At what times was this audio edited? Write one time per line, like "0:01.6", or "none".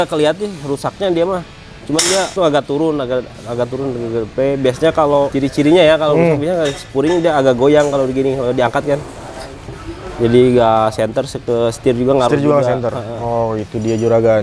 0:02.3
0:05.3
0:09.7

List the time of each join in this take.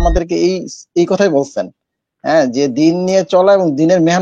none

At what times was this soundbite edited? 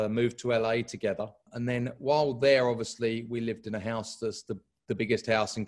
0:01.5

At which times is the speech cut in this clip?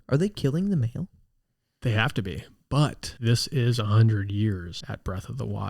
0:03.1
0:04.8

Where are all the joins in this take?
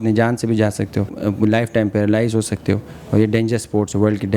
0:01.1

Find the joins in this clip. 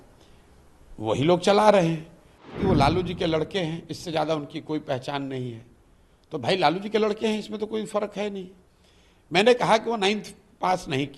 0:02.5

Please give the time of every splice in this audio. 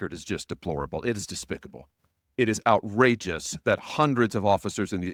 none

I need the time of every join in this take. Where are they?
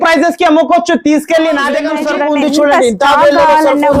0:02.0

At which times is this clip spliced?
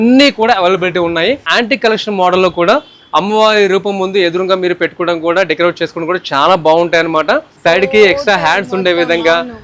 0:01.5
0:07.5

